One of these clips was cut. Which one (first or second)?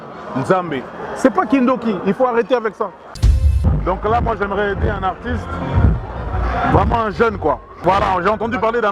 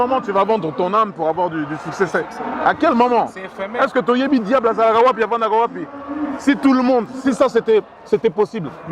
first